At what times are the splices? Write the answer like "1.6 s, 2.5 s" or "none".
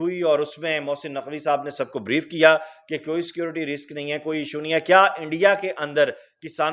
none